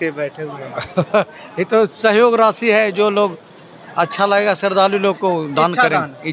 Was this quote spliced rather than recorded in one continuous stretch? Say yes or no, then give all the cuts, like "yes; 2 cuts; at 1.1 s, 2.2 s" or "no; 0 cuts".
no; 0 cuts